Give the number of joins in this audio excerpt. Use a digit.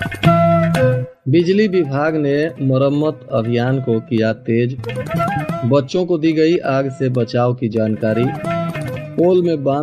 1